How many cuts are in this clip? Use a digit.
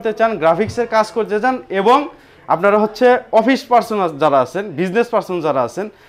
0